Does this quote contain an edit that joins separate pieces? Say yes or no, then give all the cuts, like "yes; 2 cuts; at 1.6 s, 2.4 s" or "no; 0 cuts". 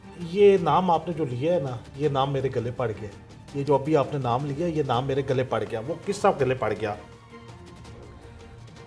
no; 0 cuts